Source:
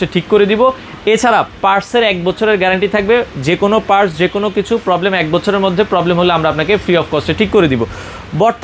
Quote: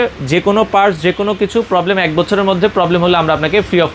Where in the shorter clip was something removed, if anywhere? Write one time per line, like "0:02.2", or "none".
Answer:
none